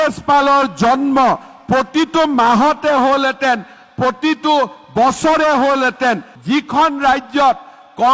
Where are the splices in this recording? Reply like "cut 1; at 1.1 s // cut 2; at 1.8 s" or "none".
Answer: cut 1; at 6.3 s